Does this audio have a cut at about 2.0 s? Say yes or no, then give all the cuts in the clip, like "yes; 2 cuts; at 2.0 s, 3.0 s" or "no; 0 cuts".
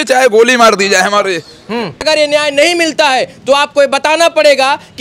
yes; 1 cut; at 2.0 s